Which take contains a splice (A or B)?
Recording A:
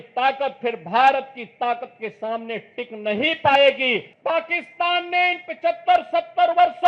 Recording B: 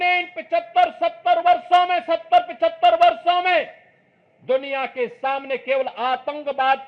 A